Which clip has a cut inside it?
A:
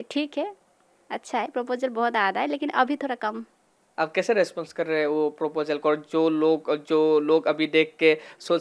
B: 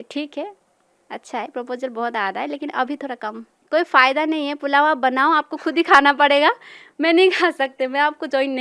B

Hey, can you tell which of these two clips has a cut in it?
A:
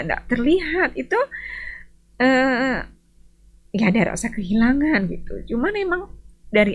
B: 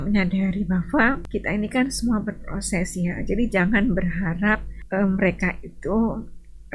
B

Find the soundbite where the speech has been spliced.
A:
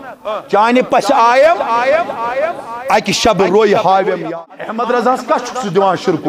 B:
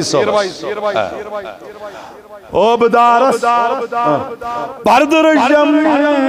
A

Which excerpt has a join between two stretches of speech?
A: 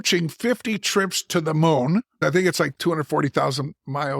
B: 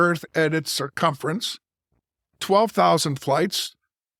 A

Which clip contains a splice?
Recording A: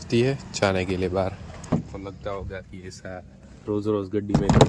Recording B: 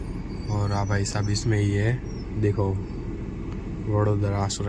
A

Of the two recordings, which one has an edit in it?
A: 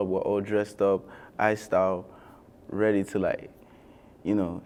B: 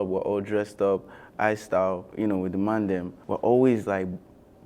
B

